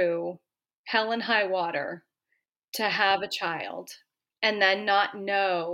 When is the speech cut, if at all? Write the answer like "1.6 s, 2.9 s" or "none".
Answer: none